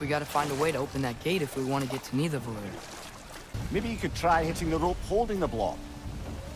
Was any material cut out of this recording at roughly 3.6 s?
yes; 1 cut; at 3.6 s

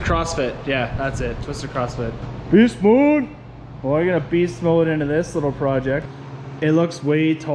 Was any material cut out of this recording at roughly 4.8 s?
no; 2 cuts; at 2.3 s, 6.1 s

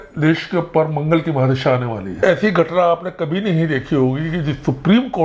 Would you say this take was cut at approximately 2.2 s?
yes; 1 cut; at 2.2 s

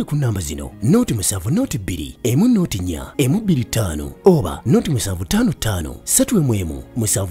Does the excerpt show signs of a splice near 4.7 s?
no; 0 cuts

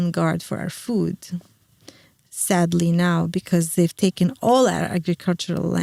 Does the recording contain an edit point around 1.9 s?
no; 0 cuts

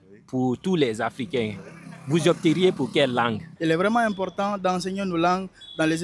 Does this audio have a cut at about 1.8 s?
no; 1 cut; at 3.5 s

